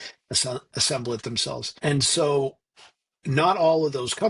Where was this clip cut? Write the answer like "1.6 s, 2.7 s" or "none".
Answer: 1.7 s

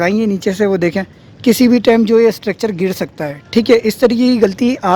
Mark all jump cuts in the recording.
none

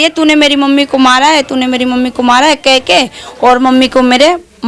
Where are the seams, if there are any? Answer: none

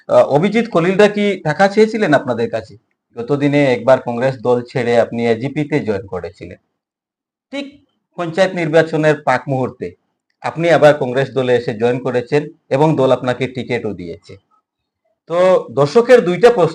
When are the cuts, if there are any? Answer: 3.1 s

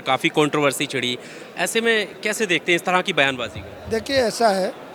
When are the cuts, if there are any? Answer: none

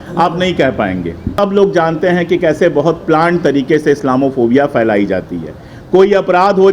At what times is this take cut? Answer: 1.3 s

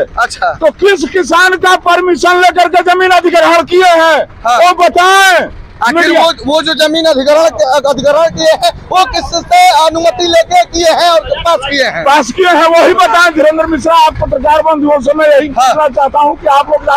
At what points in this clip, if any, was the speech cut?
none

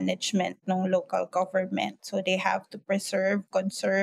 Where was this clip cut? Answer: none

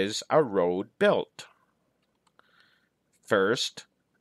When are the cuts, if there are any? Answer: 2.1 s

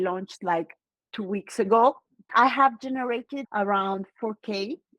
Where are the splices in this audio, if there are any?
2.1 s

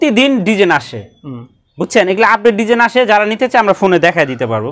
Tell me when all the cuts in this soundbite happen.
none

